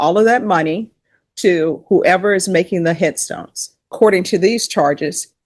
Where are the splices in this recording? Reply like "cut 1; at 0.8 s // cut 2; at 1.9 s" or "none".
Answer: cut 1; at 3.9 s

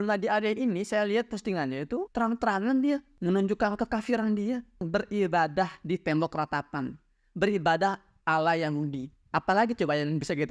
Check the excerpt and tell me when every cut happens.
cut 1; at 2.1 s // cut 2; at 4.8 s

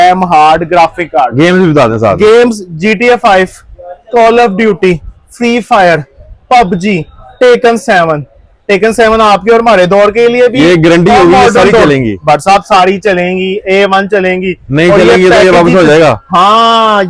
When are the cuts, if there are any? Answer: none

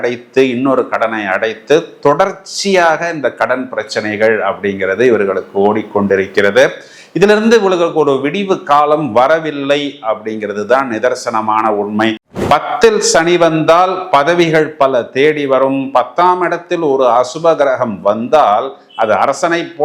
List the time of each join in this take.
cut 1; at 12.2 s

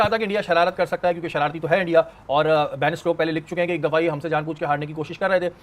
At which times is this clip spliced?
none

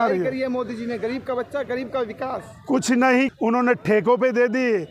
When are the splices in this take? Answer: cut 1; at 3.3 s

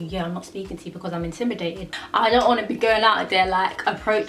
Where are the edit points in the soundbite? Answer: cut 1; at 1.9 s

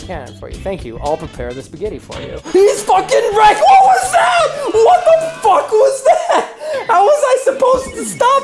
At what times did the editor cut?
cut 1; at 2.5 s

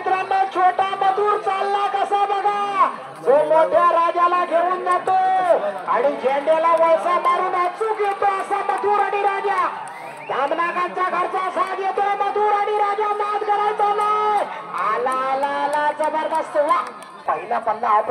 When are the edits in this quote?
cut 1; at 17.1 s

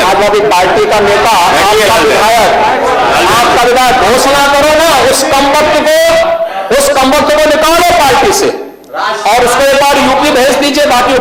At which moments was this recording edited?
none

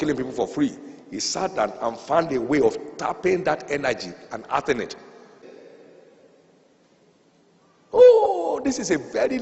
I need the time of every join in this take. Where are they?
cut 1; at 5.4 s

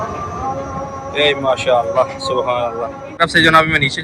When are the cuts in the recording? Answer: cut 1; at 3.0 s

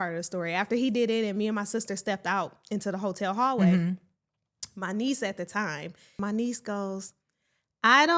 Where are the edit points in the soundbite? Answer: cut 1; at 6.2 s

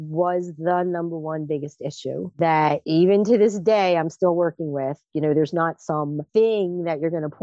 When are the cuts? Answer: cut 1; at 5.0 s

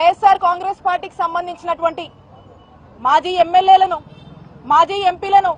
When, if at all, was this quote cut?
none

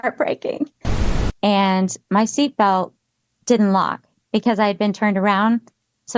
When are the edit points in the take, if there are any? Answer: cut 1; at 0.9 s

